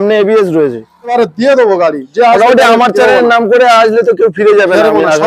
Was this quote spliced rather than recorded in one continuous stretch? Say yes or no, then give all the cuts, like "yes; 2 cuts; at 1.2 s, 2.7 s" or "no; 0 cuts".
yes; 1 cut; at 1.1 s